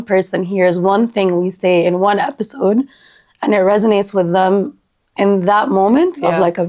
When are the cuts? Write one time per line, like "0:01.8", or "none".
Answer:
none